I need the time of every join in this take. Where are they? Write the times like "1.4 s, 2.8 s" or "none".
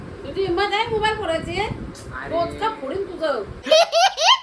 3.5 s